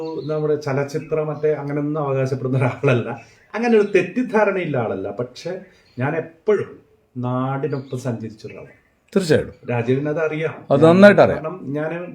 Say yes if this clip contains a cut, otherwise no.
no